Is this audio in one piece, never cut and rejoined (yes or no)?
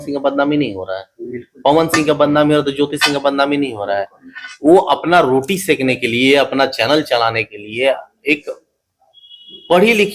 yes